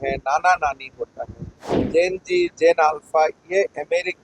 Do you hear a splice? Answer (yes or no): yes